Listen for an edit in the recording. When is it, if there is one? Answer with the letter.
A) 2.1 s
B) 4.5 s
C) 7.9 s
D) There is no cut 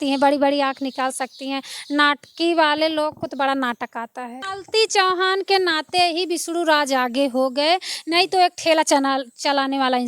B